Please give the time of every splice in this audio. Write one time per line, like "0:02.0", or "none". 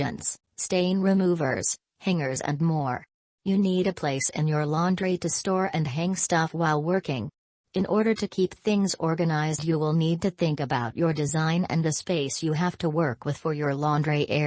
0:13.4